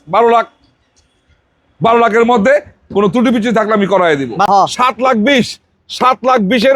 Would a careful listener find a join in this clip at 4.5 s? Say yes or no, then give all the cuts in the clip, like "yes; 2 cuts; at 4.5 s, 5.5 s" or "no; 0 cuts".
yes; 1 cut; at 4.5 s